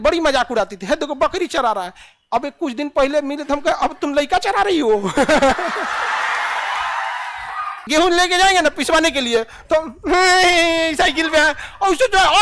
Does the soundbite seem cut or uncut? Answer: cut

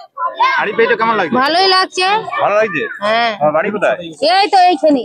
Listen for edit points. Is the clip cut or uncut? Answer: uncut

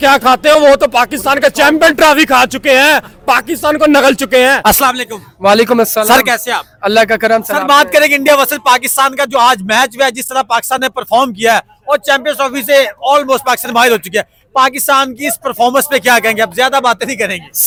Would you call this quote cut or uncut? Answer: uncut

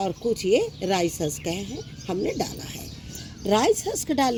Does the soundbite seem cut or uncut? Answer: uncut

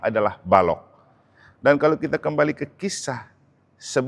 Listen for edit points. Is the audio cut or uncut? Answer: uncut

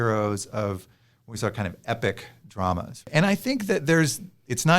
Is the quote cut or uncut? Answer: cut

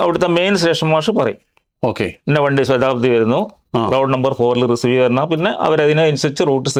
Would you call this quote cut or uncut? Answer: uncut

